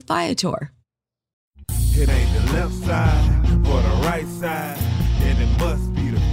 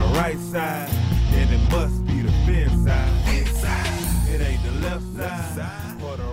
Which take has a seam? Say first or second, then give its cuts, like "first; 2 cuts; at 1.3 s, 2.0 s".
first; 1 cut; at 1.5 s